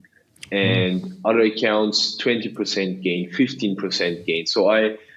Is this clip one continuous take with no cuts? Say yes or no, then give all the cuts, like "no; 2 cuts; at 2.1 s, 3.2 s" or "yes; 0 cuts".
yes; 0 cuts